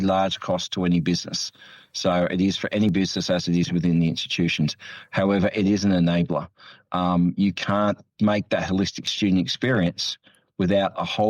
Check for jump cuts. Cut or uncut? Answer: cut